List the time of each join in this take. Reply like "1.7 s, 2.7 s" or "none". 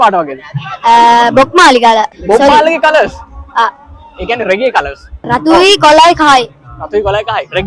2.2 s, 5.2 s